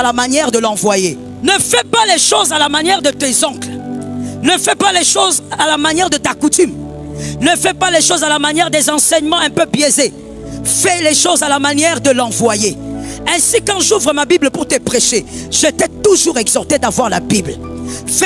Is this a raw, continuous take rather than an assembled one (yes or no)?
no